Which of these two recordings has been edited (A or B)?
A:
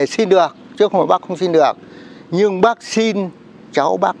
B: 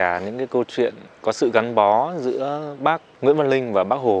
B